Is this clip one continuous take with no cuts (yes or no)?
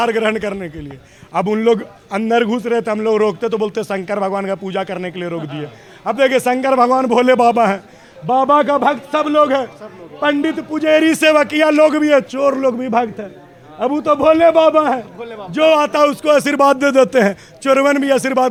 yes